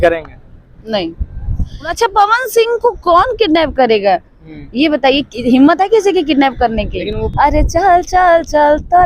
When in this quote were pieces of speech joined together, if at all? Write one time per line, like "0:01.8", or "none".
0:01.9
0:07.2